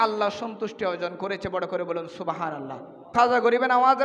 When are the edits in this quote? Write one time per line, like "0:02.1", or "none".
0:03.1